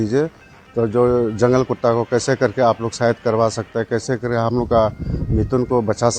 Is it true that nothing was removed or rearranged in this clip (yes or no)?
yes